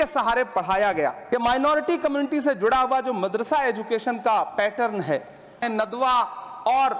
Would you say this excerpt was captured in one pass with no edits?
no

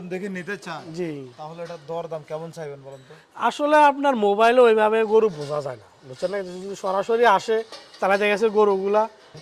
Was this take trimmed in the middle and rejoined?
no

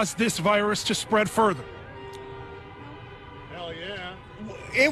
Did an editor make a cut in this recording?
no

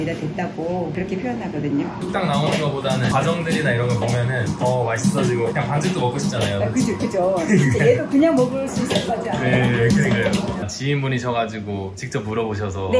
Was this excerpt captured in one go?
no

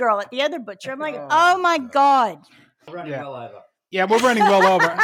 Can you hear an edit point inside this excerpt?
yes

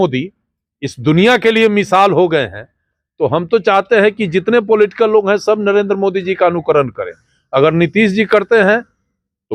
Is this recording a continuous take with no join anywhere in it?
yes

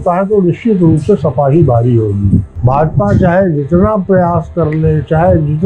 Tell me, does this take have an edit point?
yes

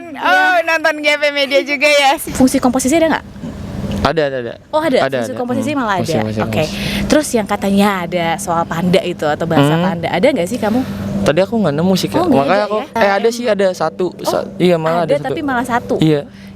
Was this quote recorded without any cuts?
no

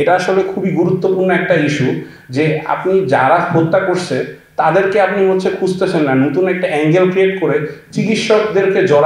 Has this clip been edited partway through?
no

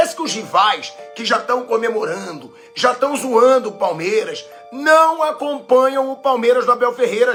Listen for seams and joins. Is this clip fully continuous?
yes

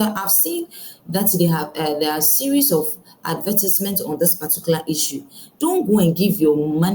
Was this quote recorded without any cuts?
yes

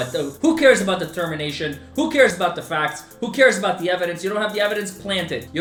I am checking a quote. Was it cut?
no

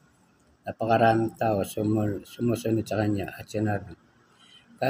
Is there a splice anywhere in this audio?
no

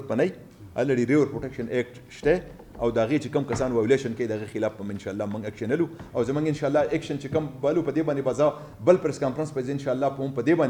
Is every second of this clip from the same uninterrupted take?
yes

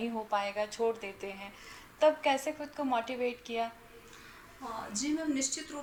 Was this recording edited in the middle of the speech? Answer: no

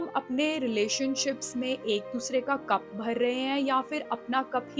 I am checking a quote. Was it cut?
no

